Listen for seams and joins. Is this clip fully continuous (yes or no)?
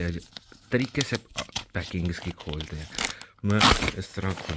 yes